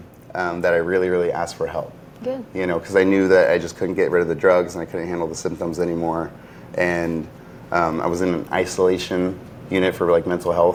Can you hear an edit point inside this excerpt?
no; 0 cuts

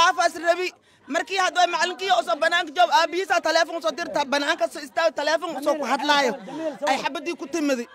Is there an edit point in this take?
no; 0 cuts

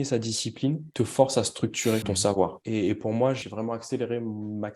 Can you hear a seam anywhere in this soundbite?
yes; 3 cuts; at 0.9 s, 2.4 s, 3.4 s

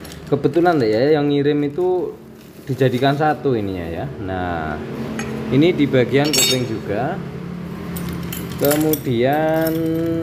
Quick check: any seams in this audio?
no; 0 cuts

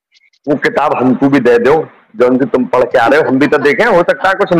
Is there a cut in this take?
no; 0 cuts

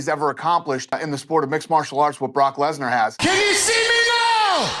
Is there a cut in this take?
yes; 2 cuts; at 1.0 s, 3.2 s

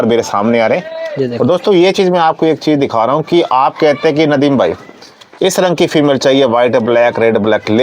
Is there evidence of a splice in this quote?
no; 0 cuts

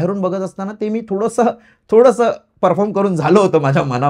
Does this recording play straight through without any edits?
yes; 0 cuts

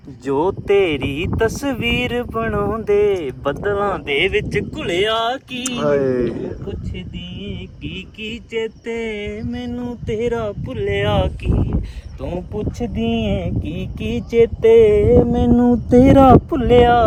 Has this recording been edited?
no; 0 cuts

